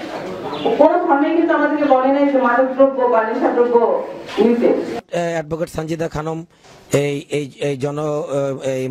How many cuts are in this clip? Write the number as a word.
one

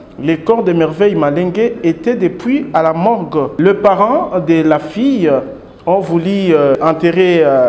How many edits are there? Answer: two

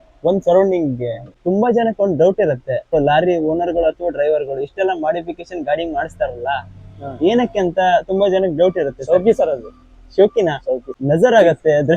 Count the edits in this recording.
three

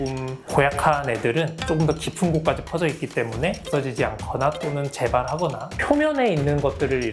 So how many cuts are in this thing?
two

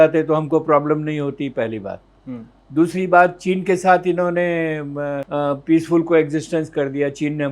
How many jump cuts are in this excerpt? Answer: one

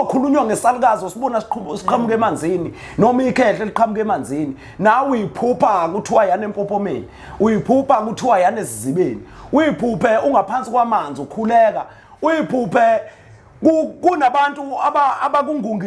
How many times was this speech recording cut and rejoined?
zero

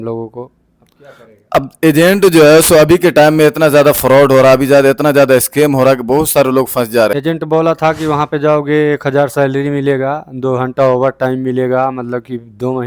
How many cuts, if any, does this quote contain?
one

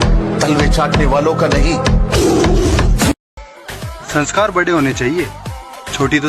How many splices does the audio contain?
one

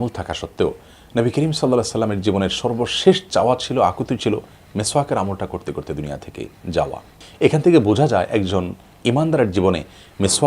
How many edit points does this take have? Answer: one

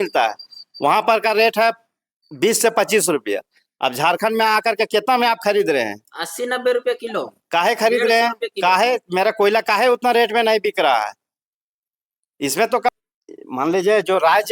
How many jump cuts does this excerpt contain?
one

